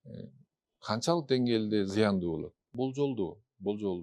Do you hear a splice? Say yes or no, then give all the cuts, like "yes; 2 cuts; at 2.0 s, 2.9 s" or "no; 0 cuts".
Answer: yes; 1 cut; at 2.7 s